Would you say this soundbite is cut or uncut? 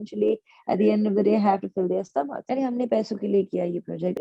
cut